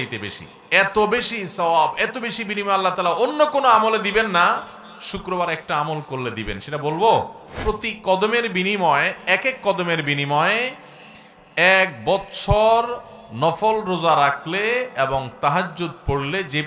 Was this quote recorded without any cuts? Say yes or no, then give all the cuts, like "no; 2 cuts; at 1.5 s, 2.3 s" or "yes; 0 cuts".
no; 1 cut; at 7.5 s